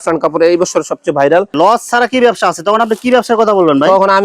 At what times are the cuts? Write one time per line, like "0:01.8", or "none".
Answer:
0:01.5